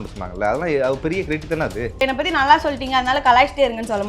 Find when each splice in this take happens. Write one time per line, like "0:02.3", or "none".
0:02.0